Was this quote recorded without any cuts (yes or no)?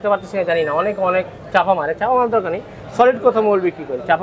yes